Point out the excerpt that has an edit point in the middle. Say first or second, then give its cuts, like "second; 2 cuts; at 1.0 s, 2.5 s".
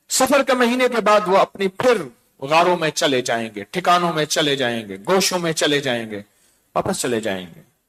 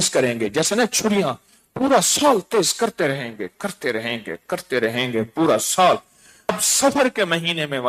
second; 1 cut; at 6.5 s